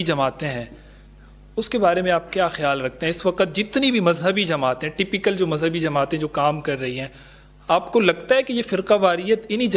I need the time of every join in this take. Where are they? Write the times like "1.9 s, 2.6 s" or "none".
none

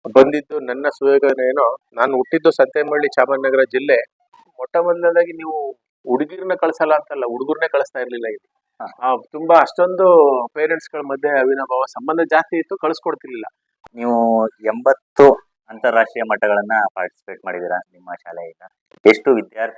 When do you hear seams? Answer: 4.4 s, 13.6 s

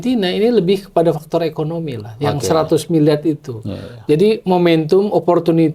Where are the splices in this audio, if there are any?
none

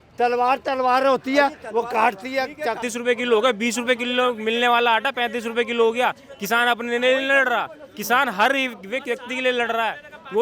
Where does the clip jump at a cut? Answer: 2.8 s

